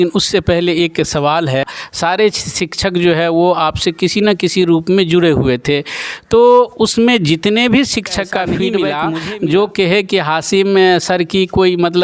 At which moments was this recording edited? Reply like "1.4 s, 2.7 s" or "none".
1.8 s, 8.9 s